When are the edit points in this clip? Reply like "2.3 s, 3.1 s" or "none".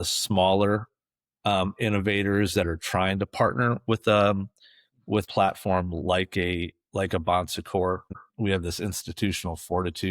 5.3 s, 8.2 s